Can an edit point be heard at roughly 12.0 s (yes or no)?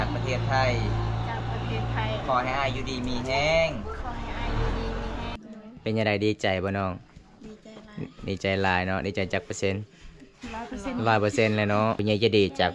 yes